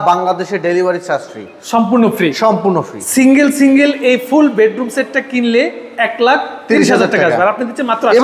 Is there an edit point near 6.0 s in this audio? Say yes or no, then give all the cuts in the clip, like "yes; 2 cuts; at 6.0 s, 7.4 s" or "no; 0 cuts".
no; 1 cut; at 3.0 s